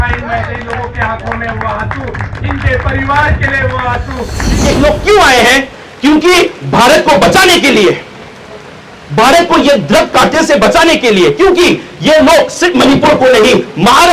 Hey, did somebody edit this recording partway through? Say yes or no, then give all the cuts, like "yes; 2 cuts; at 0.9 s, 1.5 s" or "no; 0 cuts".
yes; 2 cuts; at 4.6 s, 8.7 s